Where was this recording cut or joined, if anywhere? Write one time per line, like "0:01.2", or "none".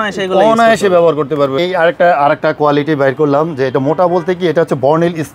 0:01.6

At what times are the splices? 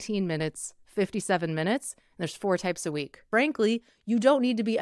0:03.2

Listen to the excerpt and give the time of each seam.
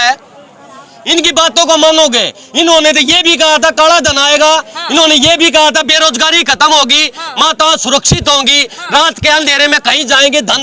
none

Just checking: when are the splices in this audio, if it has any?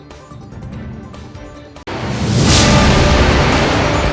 0:01.4

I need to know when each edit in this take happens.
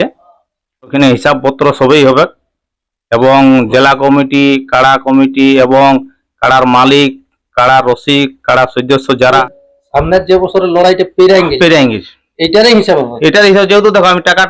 0:00.9
0:09.4

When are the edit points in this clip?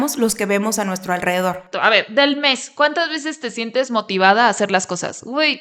0:01.7

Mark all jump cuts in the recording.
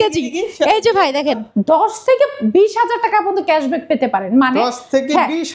0:01.4

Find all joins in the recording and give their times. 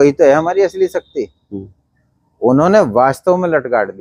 none

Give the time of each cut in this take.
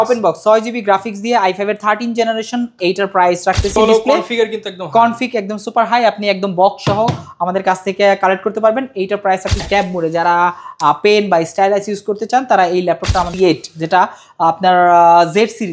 0:03.8
0:09.6
0:13.3

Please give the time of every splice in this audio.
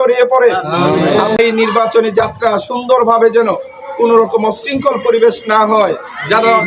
0:01.4

